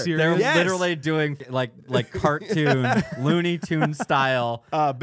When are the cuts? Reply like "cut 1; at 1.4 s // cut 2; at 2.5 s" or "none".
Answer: cut 1; at 1.4 s